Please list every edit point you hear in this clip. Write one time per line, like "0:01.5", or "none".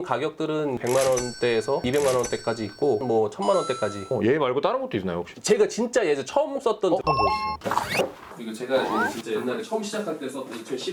0:00.8
0:01.8
0:03.0
0:07.0
0:08.3

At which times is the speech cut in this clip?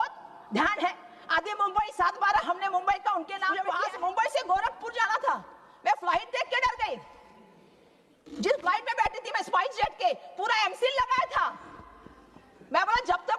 0:03.7

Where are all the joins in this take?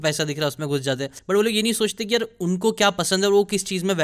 0:01.1

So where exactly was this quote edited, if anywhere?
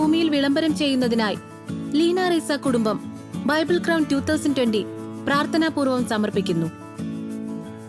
0:06.7

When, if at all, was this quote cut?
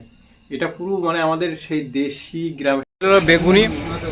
0:02.9

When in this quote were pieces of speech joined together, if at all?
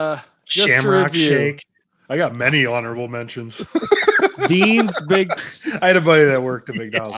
0:05.4

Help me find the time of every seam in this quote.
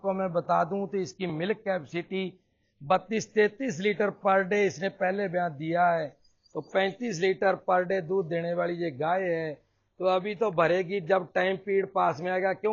none

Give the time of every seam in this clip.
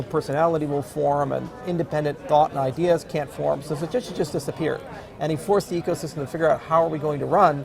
none

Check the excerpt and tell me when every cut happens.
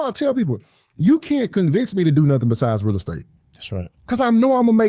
none

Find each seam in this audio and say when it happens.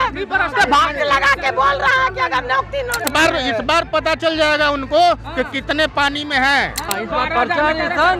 0:03.1
0:06.9

